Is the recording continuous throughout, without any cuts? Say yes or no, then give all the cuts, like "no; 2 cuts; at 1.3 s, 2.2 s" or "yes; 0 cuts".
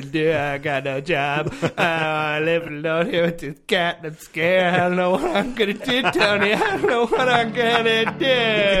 yes; 0 cuts